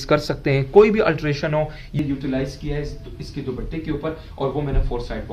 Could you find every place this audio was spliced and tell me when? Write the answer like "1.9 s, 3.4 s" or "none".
1.9 s